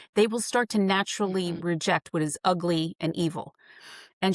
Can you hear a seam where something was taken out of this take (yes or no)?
no